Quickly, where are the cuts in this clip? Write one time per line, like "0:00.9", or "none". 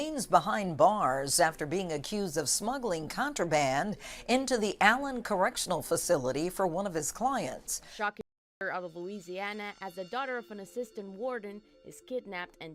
0:07.6